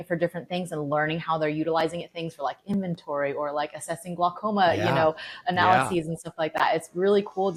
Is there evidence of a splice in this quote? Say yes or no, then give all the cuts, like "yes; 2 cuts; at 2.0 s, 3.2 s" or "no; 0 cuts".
no; 0 cuts